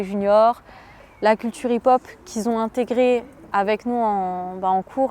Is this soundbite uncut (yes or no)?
no